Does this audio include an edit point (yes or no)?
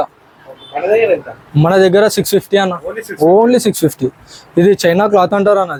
no